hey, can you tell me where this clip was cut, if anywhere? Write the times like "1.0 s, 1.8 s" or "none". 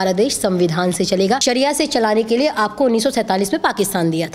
1.4 s

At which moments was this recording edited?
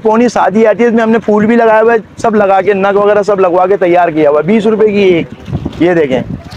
none

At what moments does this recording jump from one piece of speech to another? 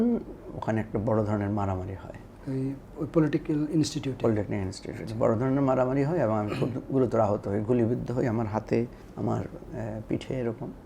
9.0 s

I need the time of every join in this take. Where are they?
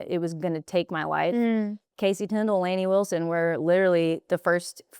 1.8 s

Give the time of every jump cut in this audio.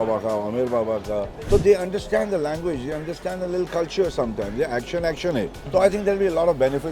1.3 s, 5.6 s

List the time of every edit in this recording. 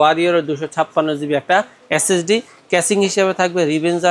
none

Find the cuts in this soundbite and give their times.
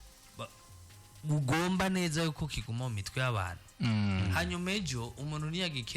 none

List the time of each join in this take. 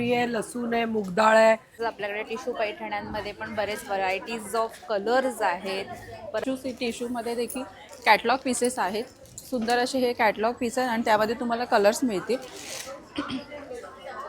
1.7 s, 6.4 s

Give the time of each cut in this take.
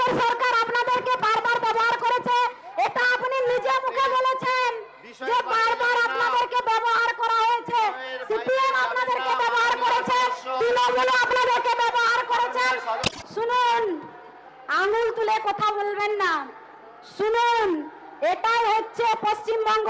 13.0 s

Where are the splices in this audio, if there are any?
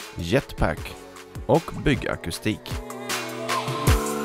2.7 s

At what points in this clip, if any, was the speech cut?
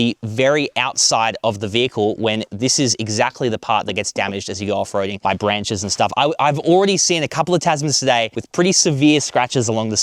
none

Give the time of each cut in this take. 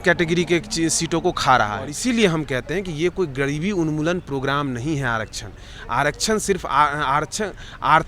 1.9 s

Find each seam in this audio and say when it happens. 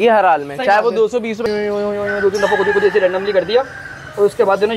1.4 s

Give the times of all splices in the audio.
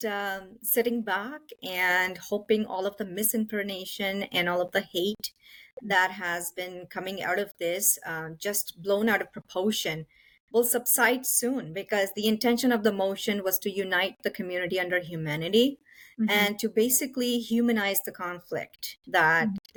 none

